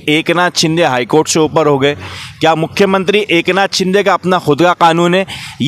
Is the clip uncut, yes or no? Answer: yes